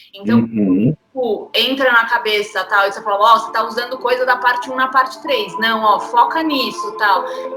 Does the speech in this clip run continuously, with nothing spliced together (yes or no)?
yes